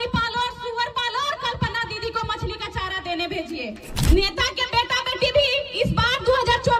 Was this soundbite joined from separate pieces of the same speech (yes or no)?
yes